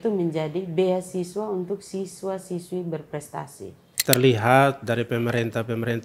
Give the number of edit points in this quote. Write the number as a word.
one